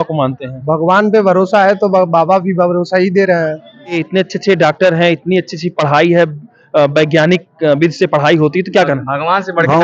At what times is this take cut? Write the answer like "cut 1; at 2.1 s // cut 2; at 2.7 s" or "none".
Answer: cut 1; at 4.0 s